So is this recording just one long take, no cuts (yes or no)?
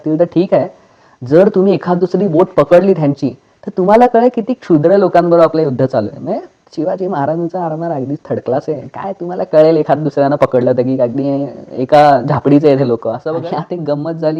no